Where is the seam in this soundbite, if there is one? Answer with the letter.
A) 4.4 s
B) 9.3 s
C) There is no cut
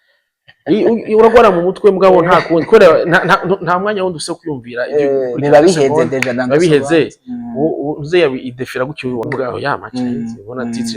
B